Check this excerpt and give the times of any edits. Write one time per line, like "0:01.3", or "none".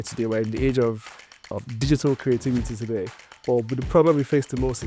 none

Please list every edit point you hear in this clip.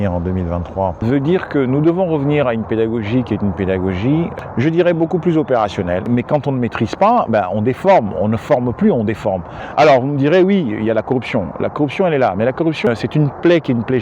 0:01.0
0:04.3
0:06.1
0:09.6
0:12.9

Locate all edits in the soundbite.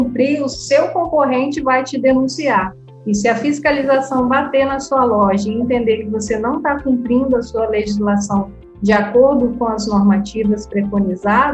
none

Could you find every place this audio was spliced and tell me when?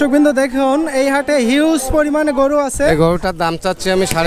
0:02.9

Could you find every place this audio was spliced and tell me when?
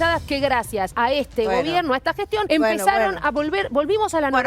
0:00.9
0:02.5

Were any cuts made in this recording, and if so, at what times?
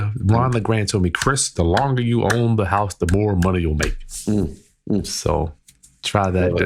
none

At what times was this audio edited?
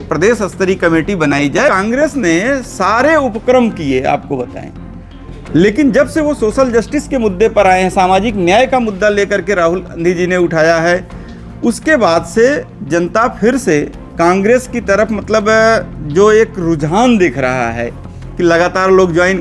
0:01.7

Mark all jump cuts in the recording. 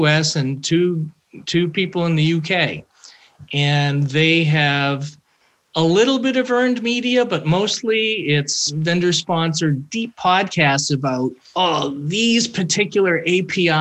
0:08.7
0:11.4

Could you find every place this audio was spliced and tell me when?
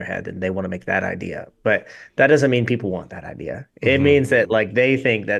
none

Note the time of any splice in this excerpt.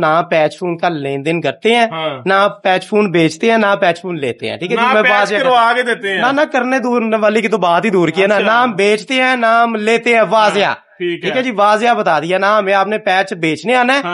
none

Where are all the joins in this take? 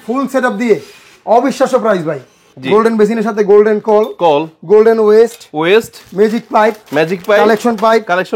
0:02.5

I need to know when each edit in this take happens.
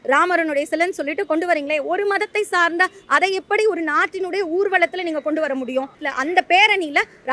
0:06.0

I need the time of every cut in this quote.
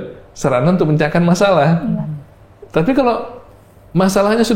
none

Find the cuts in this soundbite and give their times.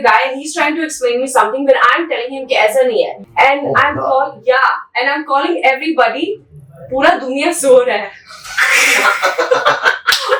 0:03.2

